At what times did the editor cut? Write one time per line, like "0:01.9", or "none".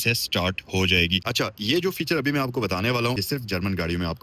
0:01.2
0:03.2

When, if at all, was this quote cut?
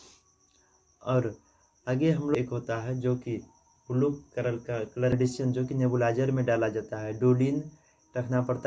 0:02.4
0:05.1

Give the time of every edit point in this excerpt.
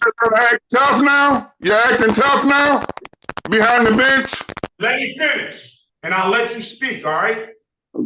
0:04.7

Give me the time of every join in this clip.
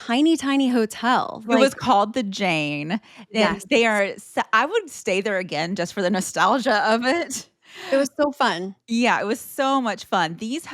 0:01.4

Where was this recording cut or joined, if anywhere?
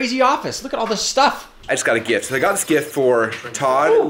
0:01.8

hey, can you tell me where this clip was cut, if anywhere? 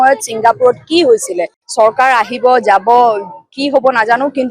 0:01.6

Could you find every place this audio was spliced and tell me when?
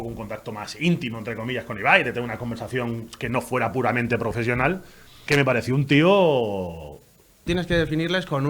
0:05.2
0:07.5

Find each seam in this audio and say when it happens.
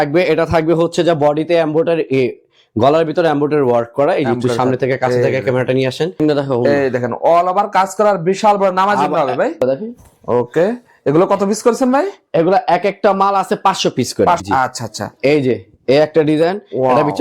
0:06.2
0:09.6
0:14.4

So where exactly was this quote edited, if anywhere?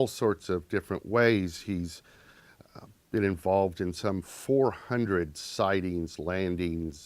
0:02.7

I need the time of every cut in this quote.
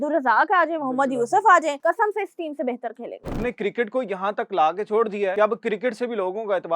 0:01.8
0:03.3
0:05.3

